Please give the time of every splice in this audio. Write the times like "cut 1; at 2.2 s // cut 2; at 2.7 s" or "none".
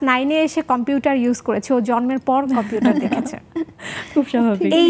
none